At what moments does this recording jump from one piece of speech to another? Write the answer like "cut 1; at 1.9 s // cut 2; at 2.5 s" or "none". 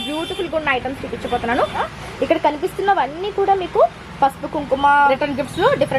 cut 1; at 1.9 s // cut 2; at 5.1 s

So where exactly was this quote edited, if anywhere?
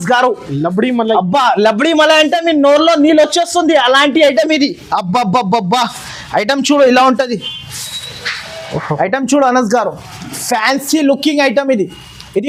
none

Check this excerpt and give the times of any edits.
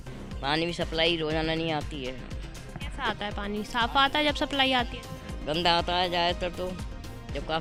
none

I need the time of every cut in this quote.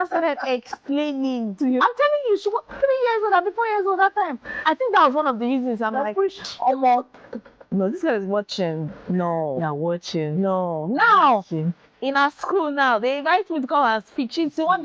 cut 1; at 1.5 s // cut 2; at 4.6 s

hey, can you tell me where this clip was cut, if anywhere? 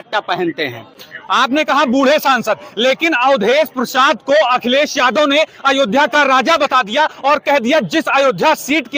none

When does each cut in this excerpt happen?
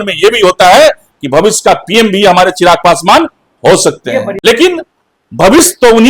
cut 1; at 4.4 s

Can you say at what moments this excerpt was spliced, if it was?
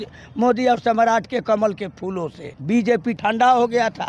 cut 1; at 2.9 s

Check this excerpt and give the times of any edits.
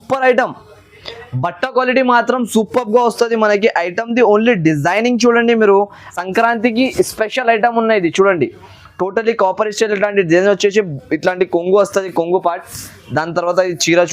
cut 1; at 6.0 s

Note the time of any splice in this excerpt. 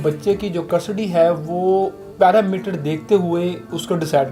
none

